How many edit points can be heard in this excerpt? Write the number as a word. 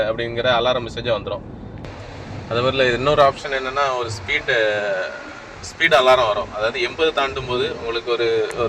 one